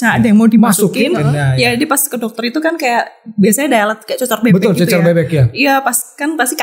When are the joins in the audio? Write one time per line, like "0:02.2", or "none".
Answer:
none